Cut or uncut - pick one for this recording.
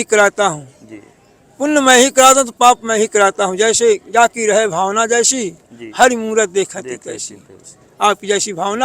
uncut